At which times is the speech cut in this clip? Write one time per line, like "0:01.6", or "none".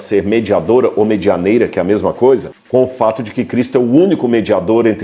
none